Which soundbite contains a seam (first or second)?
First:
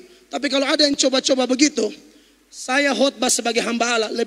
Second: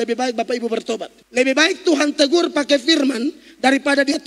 second